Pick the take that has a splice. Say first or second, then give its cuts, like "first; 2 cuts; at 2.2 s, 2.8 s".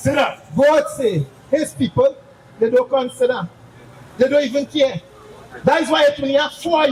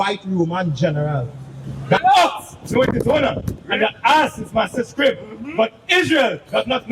second; 1 cut; at 2.0 s